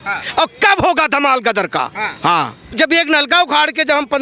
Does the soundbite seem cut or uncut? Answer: cut